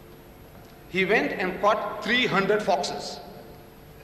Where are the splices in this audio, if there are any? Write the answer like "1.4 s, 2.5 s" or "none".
3.1 s